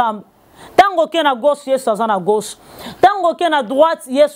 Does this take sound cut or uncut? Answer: uncut